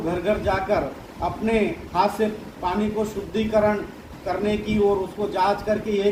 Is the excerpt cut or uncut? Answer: uncut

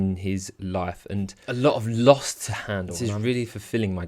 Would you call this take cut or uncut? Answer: cut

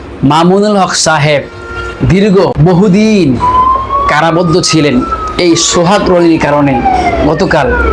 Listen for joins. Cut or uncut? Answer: cut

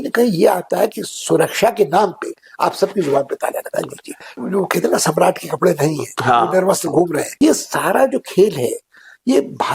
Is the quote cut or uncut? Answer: cut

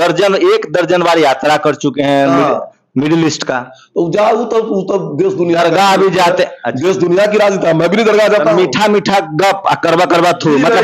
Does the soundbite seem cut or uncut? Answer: uncut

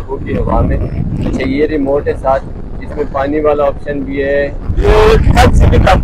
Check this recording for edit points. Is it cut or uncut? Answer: uncut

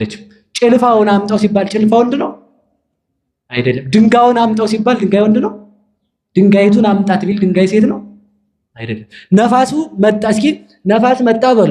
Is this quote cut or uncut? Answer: uncut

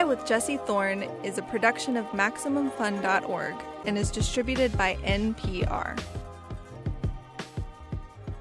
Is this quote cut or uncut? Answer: uncut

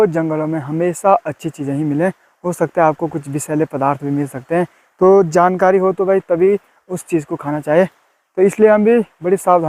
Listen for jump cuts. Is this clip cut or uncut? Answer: uncut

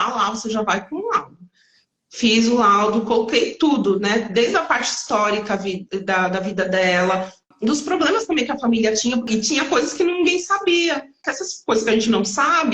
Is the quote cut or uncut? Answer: cut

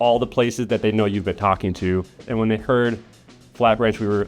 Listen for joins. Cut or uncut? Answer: cut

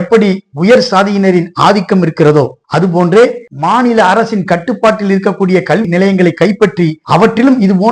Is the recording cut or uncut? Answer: cut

